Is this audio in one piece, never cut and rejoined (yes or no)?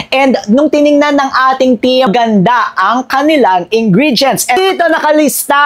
no